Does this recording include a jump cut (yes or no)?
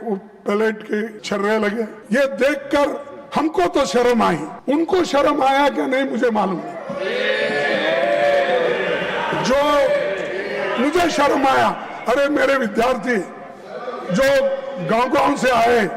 yes